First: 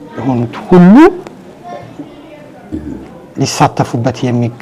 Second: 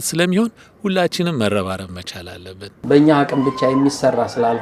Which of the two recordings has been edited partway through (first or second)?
second